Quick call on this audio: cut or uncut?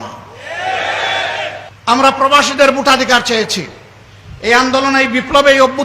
cut